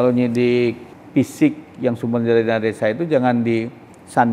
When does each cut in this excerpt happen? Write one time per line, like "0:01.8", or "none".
0:00.9